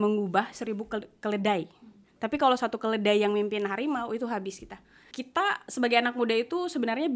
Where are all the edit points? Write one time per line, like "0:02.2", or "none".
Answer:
0:05.1